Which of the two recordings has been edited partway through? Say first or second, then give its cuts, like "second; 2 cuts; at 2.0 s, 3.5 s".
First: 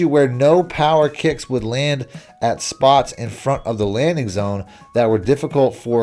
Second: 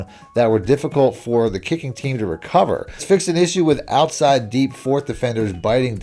second; 1 cut; at 3.0 s